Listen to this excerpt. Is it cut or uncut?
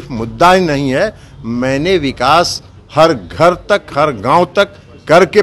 uncut